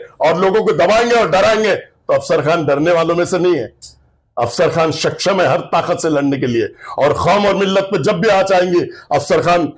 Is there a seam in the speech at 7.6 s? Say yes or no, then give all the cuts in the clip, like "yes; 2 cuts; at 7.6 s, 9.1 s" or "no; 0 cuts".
no; 0 cuts